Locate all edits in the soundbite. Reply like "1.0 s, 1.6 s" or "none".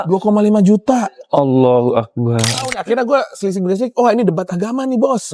2.8 s